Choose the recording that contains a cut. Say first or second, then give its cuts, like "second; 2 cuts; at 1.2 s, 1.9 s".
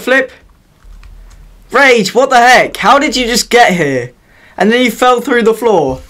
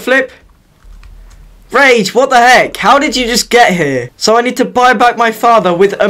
second; 1 cut; at 4.1 s